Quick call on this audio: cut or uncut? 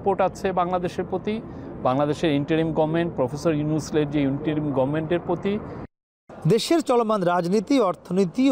uncut